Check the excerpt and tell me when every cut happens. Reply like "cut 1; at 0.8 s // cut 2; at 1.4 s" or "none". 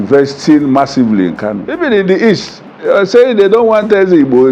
cut 1; at 1.6 s